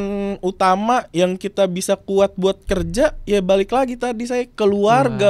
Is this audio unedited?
yes; 0 cuts

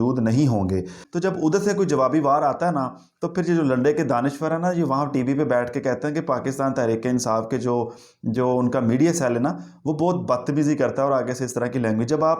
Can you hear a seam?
yes; 1 cut; at 1.0 s

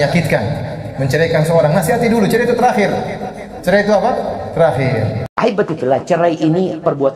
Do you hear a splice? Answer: yes; 1 cut; at 5.2 s

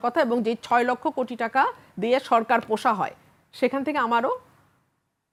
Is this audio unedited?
yes; 0 cuts

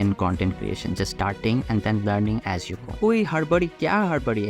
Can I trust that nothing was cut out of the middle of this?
no; 1 cut; at 2.9 s

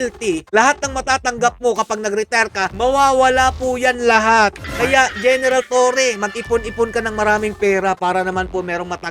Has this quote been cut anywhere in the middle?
yes; 1 cut; at 4.6 s

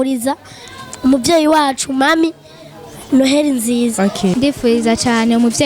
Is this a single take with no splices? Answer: no; 1 cut; at 4.3 s

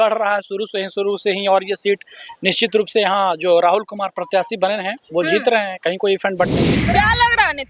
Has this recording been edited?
yes; 1 cut; at 6.8 s

